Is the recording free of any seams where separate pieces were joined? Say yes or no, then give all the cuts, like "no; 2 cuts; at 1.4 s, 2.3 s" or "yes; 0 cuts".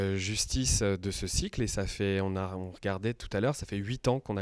yes; 0 cuts